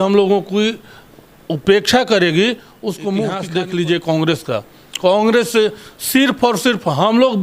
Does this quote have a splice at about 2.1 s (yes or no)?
no